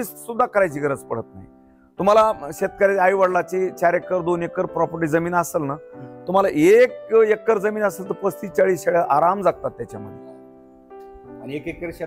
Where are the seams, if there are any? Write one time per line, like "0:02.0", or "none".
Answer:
none